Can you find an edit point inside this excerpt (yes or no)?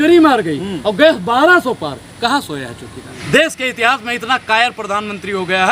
yes